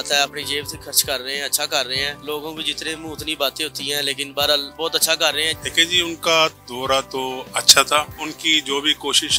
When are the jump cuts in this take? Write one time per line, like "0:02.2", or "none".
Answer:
0:02.2
0:04.7
0:05.5
0:08.1